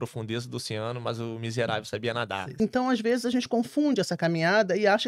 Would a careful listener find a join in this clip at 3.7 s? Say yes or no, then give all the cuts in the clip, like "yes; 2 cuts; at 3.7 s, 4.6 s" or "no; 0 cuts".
no; 1 cut; at 2.5 s